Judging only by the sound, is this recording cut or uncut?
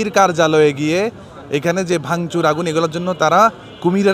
uncut